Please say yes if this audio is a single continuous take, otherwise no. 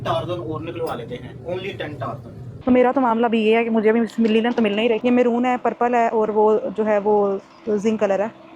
no